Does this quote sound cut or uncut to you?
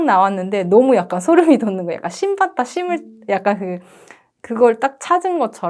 uncut